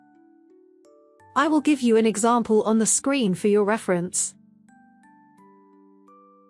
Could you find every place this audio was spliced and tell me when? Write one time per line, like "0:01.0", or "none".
0:01.3
0:04.2